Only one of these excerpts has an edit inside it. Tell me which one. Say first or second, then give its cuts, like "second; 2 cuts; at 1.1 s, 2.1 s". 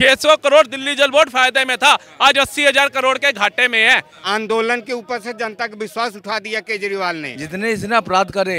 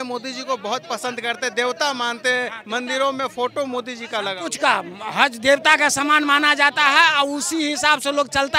first; 2 cuts; at 4.1 s, 7.4 s